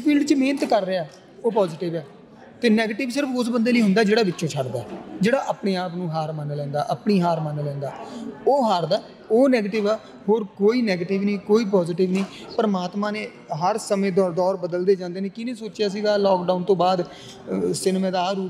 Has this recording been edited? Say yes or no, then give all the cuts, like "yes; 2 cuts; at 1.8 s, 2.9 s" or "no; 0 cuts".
no; 0 cuts